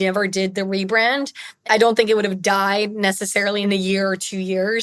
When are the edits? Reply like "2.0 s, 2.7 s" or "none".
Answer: 1.6 s, 3.6 s